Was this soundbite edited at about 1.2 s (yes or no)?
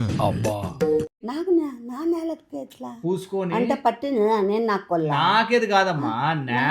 yes